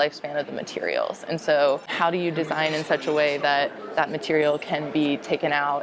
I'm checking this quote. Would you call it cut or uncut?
cut